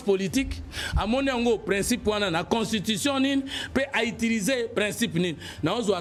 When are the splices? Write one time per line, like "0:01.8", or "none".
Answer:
none